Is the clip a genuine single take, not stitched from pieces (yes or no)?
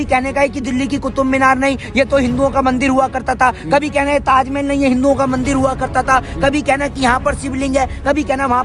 yes